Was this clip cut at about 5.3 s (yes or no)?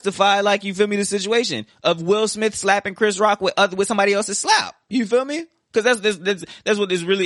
no